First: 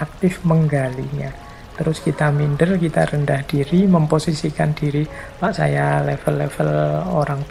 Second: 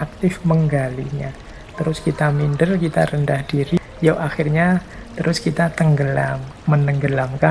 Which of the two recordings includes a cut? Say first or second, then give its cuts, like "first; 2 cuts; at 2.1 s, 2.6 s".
second; 2 cuts; at 3.8 s, 6.5 s